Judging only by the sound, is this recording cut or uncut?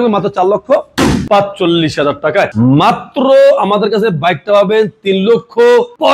cut